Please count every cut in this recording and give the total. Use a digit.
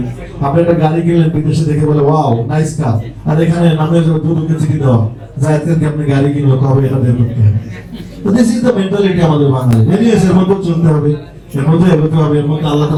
0